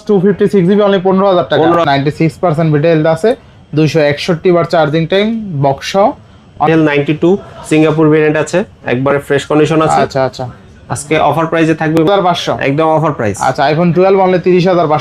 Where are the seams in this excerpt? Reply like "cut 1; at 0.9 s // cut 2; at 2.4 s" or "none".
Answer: cut 1; at 1.8 s // cut 2; at 6.6 s // cut 3; at 12.1 s